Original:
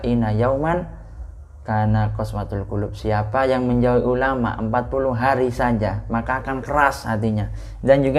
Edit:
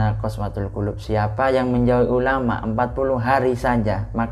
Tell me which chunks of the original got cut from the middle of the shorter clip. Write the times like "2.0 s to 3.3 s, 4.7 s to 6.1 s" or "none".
none

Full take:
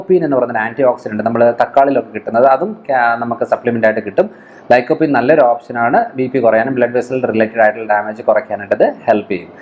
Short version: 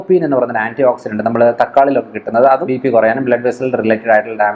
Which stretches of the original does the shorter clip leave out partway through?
2.6 s to 6.1 s

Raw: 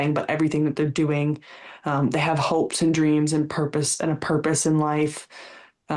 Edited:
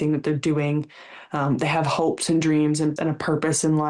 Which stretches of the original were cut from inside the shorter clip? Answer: 3.5 s to 4.0 s

